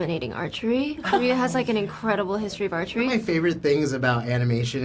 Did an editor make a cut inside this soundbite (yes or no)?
yes